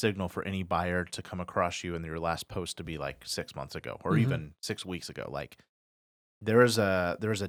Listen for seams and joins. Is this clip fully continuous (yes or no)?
yes